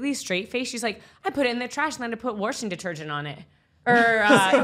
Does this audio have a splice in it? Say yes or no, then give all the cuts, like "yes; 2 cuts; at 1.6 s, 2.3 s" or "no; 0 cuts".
no; 0 cuts